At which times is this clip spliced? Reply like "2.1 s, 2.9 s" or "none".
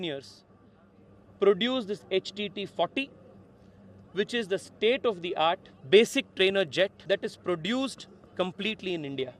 5.7 s, 7.0 s